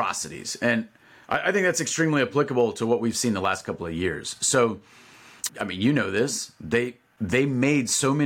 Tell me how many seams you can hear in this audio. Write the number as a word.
zero